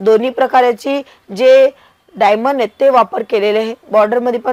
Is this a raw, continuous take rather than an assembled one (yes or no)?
yes